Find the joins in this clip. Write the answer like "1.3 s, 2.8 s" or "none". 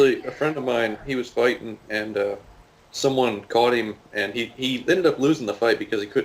4.8 s